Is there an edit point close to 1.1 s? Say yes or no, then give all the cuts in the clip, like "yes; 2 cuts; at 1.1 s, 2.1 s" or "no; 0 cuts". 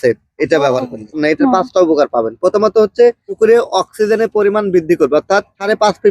yes; 1 cut; at 1.1 s